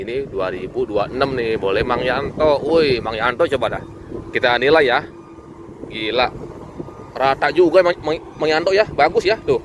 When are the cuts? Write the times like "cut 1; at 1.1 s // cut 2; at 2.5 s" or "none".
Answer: none